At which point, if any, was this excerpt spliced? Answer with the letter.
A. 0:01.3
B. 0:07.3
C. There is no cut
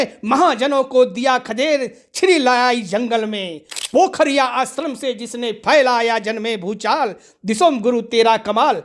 C